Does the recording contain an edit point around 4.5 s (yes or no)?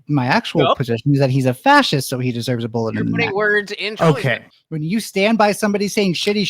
yes